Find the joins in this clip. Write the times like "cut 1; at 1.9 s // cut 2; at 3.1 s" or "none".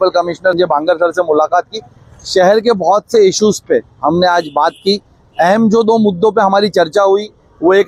none